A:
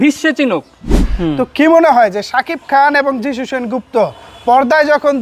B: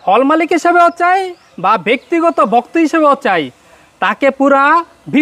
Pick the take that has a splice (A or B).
A